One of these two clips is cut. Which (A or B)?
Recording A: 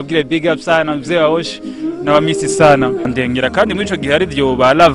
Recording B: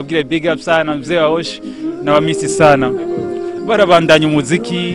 A